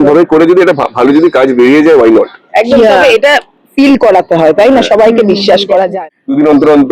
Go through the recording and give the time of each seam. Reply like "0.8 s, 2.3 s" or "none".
5.9 s